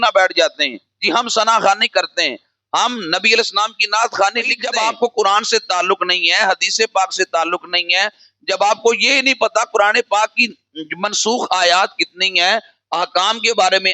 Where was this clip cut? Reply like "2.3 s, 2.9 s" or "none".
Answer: 4.6 s